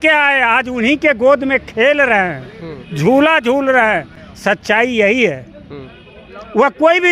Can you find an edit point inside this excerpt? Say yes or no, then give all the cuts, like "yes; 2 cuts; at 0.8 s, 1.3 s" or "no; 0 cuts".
no; 0 cuts